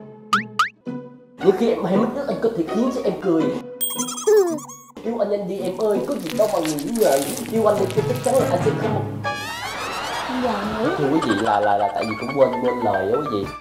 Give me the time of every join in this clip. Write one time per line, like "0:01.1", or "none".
none